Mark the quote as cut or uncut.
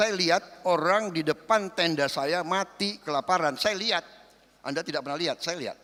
uncut